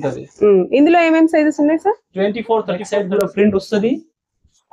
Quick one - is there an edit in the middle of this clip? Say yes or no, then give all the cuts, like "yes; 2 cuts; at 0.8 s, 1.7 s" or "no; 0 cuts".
yes; 1 cut; at 2.9 s